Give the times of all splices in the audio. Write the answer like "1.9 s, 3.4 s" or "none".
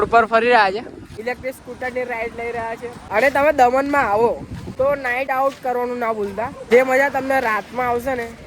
1.1 s, 3.0 s, 5.0 s